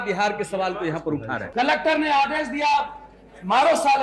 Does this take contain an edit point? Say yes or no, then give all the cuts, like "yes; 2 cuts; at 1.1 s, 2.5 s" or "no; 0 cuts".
yes; 1 cut; at 1.4 s